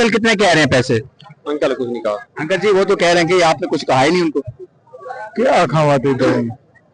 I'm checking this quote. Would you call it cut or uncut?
cut